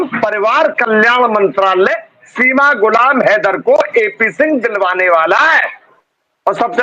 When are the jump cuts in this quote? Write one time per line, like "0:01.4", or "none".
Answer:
0:05.8